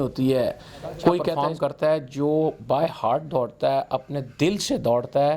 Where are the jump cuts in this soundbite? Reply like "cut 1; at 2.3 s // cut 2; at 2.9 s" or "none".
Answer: cut 1; at 1.3 s